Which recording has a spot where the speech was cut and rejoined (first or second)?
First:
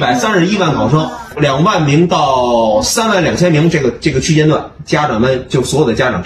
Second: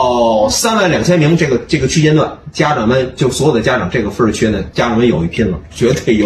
first